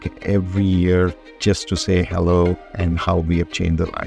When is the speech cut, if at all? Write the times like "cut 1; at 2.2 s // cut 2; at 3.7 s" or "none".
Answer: cut 1; at 1.3 s // cut 2; at 2.7 s